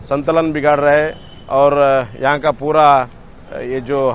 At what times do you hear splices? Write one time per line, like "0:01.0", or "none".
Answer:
none